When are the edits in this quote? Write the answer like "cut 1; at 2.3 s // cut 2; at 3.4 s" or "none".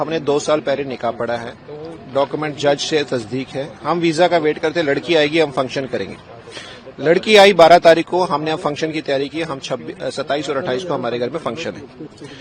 none

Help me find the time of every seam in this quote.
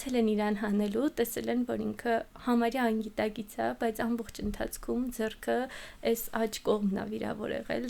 none

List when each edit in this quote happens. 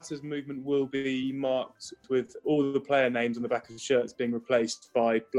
cut 1; at 2.3 s

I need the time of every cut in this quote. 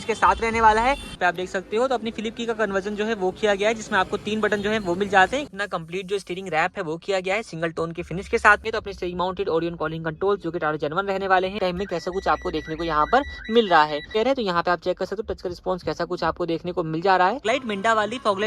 cut 1; at 1.1 s // cut 2; at 5.5 s // cut 3; at 8.6 s // cut 4; at 11.6 s // cut 5; at 14.2 s // cut 6; at 17.4 s

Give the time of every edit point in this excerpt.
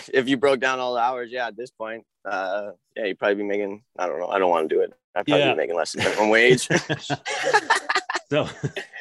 none

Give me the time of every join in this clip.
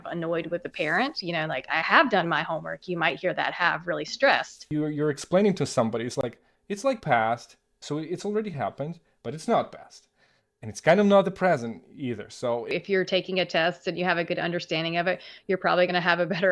cut 1; at 4.7 s // cut 2; at 12.7 s

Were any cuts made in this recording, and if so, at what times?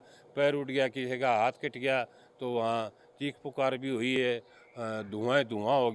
none

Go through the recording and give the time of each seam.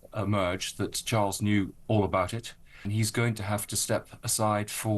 cut 1; at 2.9 s

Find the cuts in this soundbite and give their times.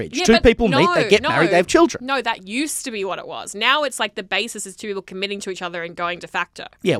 none

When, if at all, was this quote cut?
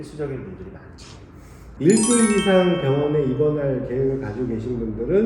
cut 1; at 1.6 s

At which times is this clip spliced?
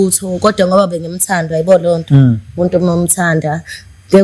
none

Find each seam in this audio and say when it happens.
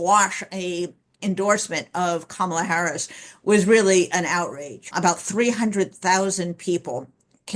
cut 1; at 4.9 s

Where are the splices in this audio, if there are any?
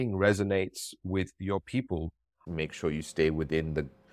cut 1; at 2.4 s

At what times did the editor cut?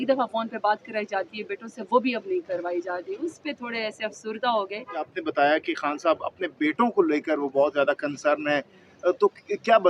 cut 1; at 5.1 s

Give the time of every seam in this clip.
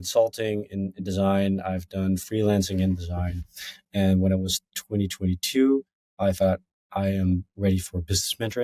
none

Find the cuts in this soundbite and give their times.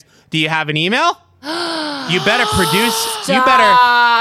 none

